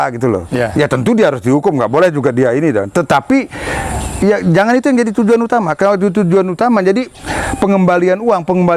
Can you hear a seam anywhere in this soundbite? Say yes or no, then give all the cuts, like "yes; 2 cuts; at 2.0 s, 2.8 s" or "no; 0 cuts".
no; 0 cuts